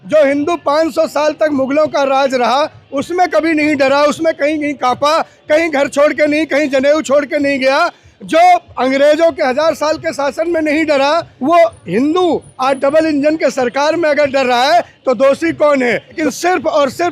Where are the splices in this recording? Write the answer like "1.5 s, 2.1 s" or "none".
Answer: 11.3 s, 16.2 s